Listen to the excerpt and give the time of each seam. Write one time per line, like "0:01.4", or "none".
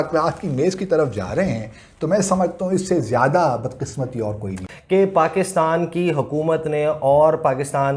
0:04.6